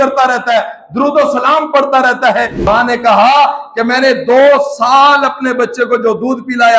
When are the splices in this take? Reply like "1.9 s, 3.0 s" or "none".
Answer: 2.6 s